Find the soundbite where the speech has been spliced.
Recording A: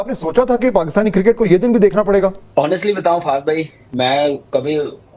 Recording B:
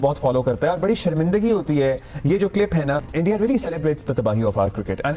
A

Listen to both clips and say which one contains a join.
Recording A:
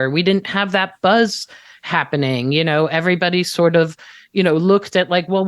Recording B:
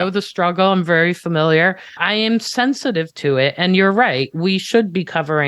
B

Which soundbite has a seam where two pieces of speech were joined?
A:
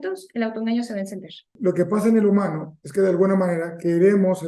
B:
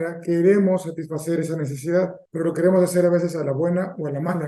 A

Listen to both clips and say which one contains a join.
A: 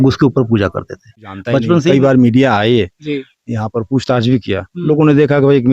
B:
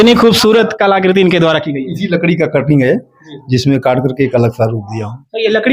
A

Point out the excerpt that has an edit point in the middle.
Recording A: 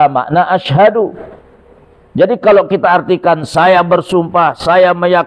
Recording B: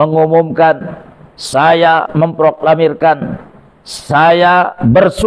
B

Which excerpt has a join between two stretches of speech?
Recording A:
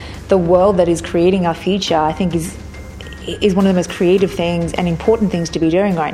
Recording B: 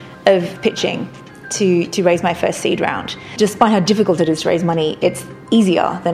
B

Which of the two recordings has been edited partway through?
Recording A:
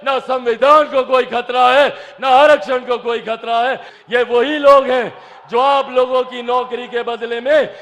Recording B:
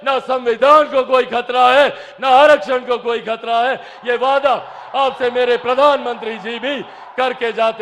A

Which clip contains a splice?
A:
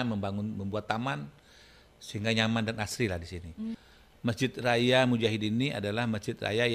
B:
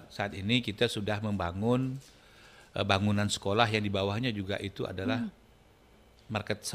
A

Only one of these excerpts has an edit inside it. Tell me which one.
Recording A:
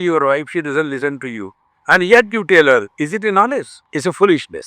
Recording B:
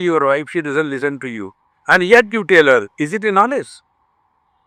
A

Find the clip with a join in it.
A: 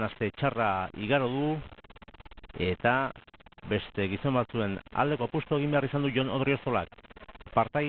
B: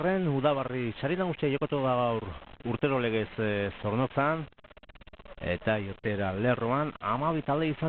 A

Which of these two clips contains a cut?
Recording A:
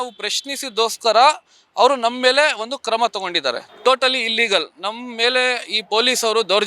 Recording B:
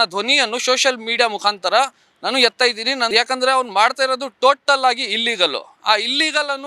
A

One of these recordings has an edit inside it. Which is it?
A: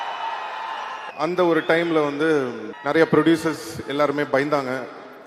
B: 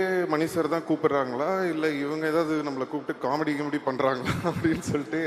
A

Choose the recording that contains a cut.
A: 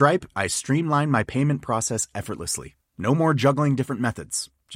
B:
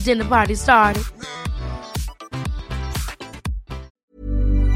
B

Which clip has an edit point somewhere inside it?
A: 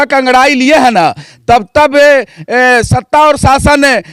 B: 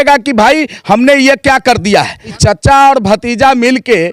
B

